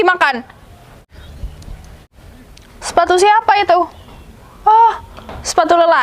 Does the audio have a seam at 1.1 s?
yes; 2 cuts; at 1.1 s, 2.1 s

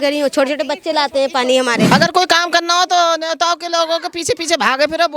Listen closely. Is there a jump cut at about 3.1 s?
no; 1 cut; at 1.9 s

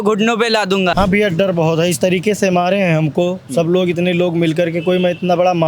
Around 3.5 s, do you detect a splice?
no; 1 cut; at 0.9 s

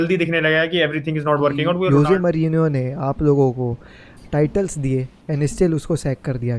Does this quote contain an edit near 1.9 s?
yes; 1 cut; at 1.9 s

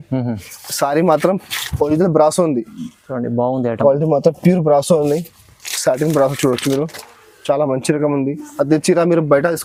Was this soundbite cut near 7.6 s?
no; 0 cuts

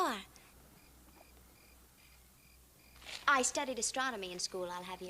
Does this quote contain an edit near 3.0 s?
yes; 1 cut; at 3.0 s

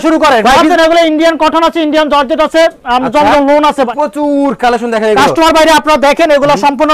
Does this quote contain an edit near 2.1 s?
no; 2 cuts; at 0.7 s, 3.9 s

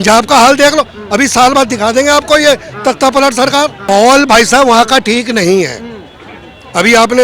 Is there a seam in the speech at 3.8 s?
yes; 1 cut; at 3.8 s

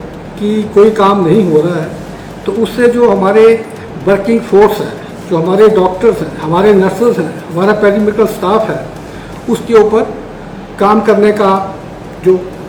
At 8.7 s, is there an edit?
no; 0 cuts

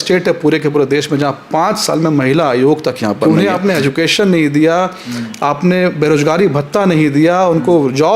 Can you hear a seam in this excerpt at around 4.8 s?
no; 1 cut; at 3.2 s

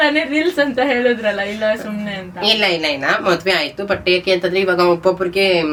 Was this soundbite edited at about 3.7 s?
no; 0 cuts

